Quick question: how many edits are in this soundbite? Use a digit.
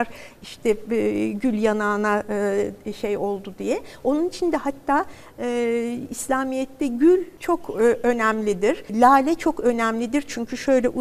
2